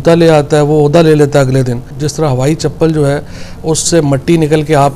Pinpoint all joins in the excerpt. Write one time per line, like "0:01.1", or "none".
0:02.0